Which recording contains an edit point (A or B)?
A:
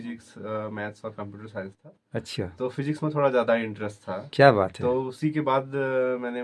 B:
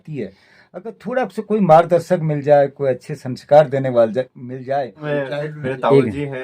B